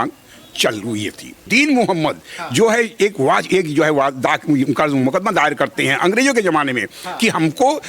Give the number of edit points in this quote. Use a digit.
1